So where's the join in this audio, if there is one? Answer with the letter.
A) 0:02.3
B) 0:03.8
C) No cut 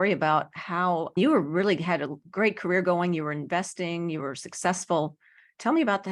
C